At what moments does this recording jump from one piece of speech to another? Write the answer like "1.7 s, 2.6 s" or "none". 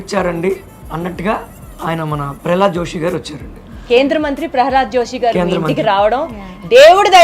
none

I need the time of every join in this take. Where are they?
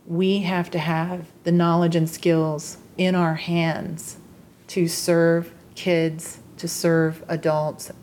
none

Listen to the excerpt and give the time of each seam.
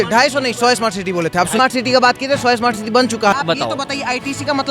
1.6 s, 3.3 s

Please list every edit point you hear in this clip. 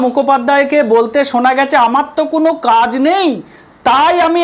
none

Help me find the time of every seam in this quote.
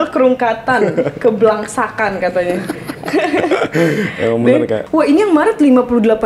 4.8 s

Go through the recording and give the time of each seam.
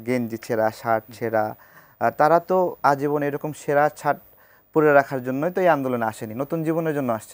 none

